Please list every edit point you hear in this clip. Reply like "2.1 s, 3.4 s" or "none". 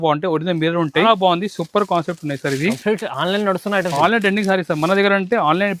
1.0 s